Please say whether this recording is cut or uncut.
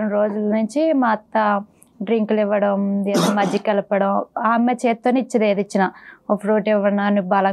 uncut